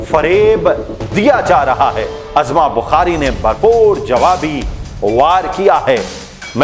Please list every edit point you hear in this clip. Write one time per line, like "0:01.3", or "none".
0:02.2